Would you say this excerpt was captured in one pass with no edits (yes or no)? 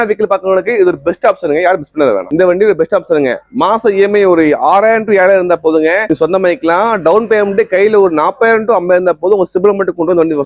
no